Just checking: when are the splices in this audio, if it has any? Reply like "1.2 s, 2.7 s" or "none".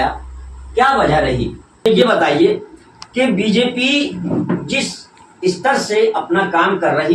1.9 s